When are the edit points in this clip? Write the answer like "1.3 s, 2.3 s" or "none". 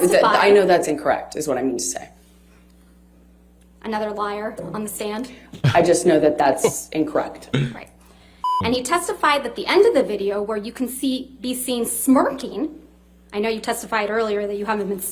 8.4 s